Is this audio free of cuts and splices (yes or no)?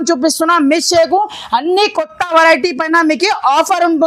yes